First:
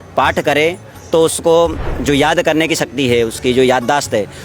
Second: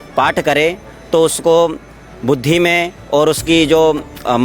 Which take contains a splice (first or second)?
first